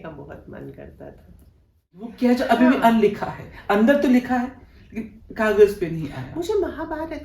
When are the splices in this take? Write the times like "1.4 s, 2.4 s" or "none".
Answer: 2.1 s

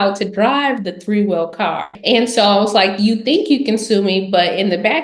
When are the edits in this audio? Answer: 1.9 s

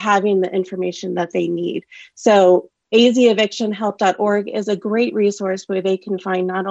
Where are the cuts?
none

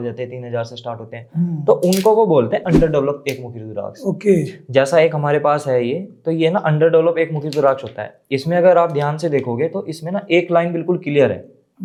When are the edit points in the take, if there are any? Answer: none

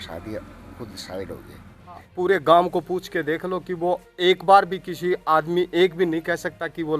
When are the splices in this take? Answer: 2.1 s

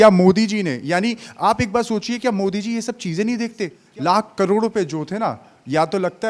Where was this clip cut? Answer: 3.8 s

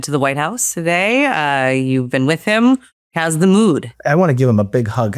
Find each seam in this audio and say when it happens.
3.1 s, 3.9 s

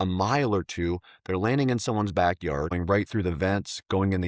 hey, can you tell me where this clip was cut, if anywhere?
2.8 s

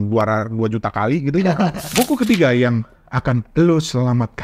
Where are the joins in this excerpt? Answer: 1.8 s

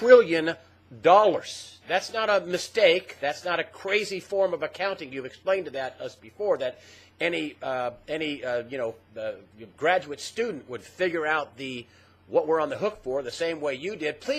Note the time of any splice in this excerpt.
9.4 s

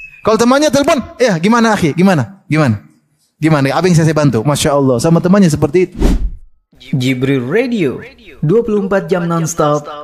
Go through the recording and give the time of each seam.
5.9 s

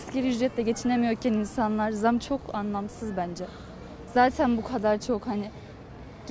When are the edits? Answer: none

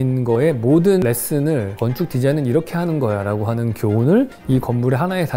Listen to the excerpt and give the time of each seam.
1.0 s, 4.4 s

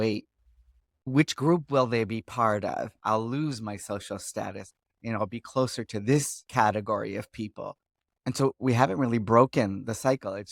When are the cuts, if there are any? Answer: 2.9 s, 6.4 s

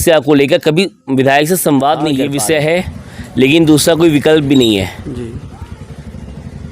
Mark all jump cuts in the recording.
2.2 s

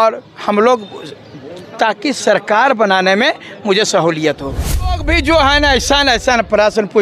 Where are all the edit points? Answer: 4.9 s

